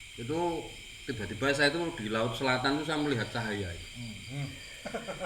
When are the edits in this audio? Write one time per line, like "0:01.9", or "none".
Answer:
none